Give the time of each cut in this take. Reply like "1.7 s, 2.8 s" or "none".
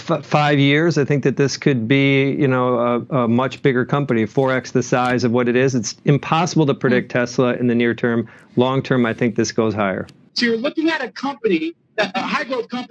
10.1 s